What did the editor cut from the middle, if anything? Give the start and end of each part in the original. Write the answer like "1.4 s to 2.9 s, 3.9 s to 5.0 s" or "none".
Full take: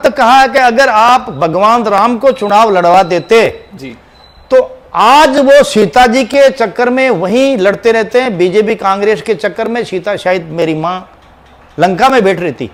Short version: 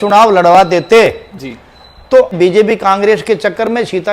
4.7 s to 8.3 s